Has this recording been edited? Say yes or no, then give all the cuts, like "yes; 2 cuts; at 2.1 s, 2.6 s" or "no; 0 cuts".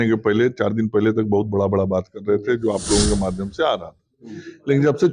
no; 0 cuts